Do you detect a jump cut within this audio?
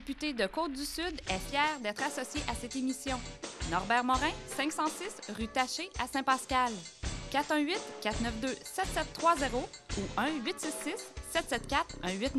no; 0 cuts

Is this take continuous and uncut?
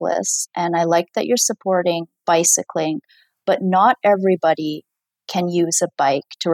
yes; 0 cuts

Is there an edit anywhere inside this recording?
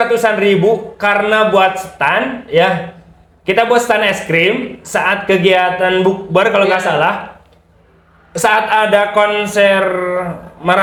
no; 0 cuts

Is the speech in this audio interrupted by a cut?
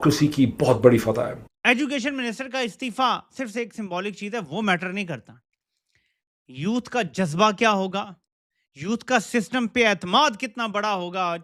no; 0 cuts

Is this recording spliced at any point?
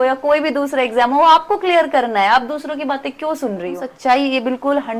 yes; 1 cut; at 3.6 s

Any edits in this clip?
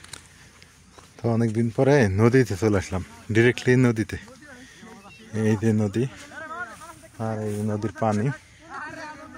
no; 0 cuts

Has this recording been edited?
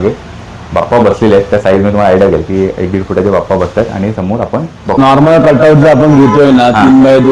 yes; 1 cut; at 4.9 s

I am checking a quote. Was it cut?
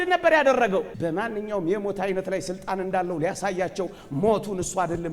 yes; 1 cut; at 0.9 s

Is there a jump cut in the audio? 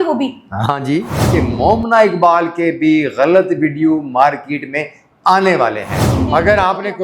yes; 2 cuts; at 1.3 s, 6.2 s

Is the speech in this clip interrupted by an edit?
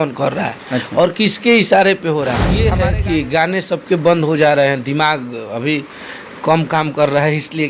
yes; 1 cut; at 2.6 s

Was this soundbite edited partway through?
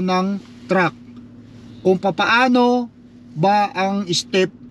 no; 0 cuts

